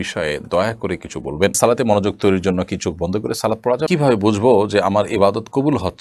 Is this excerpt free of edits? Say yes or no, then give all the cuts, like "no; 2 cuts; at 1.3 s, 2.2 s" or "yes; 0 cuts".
no; 2 cuts; at 1.6 s, 3.9 s